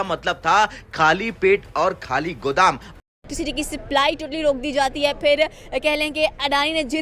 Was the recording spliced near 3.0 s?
yes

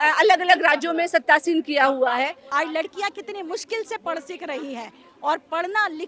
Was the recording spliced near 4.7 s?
no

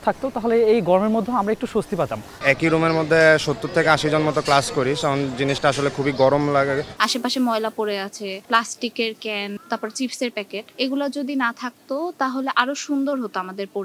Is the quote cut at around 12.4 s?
no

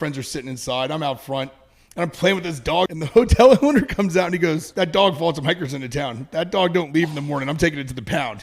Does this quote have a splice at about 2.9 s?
yes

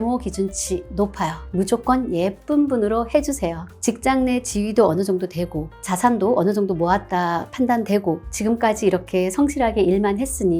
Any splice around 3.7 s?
yes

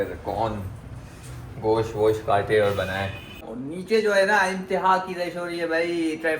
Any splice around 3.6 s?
yes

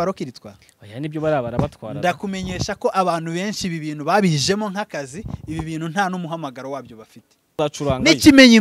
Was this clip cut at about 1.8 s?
no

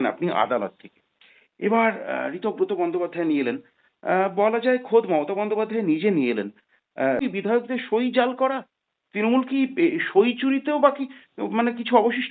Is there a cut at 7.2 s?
yes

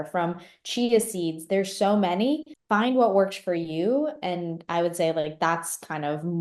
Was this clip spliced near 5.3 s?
no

